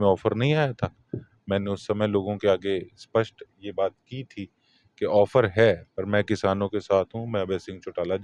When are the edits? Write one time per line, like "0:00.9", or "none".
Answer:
none